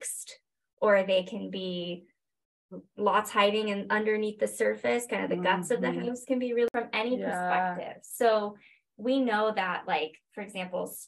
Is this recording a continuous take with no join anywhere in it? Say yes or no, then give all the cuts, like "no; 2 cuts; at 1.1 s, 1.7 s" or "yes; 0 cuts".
no; 1 cut; at 6.7 s